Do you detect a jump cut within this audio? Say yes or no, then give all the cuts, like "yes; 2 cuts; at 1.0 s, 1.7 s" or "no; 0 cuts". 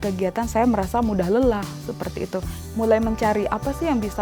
yes; 1 cut; at 2.6 s